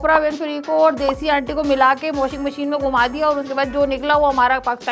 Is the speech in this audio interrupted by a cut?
no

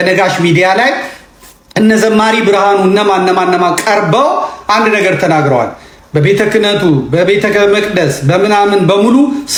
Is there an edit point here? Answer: no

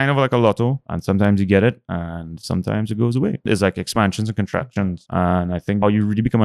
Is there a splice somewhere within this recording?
yes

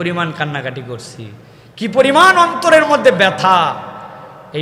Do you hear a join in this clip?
no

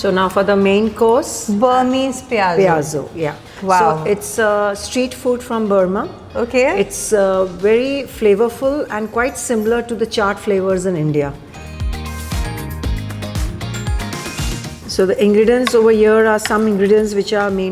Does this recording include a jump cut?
no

